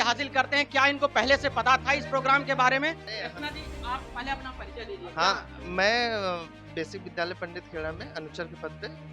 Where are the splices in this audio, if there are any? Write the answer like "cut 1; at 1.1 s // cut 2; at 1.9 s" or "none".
none